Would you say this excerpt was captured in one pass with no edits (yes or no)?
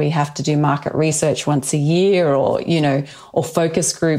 yes